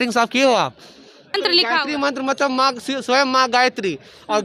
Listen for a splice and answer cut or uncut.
cut